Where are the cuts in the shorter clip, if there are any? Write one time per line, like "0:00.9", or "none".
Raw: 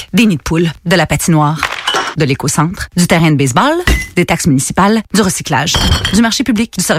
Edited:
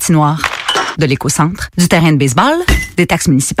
none